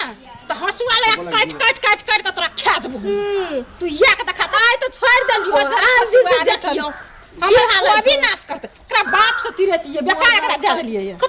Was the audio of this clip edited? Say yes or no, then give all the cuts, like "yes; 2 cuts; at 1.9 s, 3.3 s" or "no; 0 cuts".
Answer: no; 0 cuts